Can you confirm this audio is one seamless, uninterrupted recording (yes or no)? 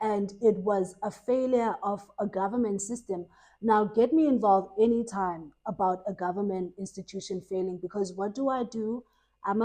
yes